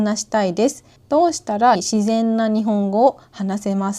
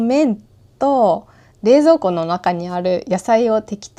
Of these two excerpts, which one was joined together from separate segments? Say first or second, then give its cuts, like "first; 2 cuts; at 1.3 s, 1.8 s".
first; 2 cuts; at 0.9 s, 1.8 s